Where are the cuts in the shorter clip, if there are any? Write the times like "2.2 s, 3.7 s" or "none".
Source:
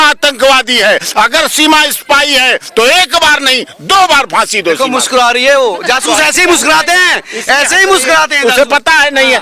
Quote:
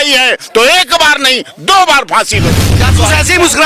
2.6 s